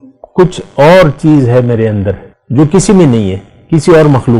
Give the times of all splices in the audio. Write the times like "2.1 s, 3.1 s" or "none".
2.3 s